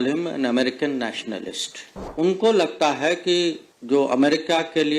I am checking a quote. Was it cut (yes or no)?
yes